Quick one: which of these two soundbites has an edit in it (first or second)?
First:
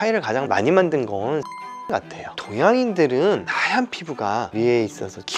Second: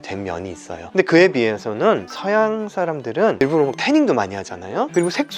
second